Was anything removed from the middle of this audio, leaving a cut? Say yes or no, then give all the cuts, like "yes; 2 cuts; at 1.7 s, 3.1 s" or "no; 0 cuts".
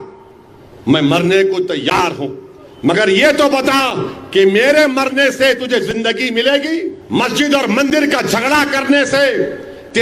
yes; 1 cut; at 7.0 s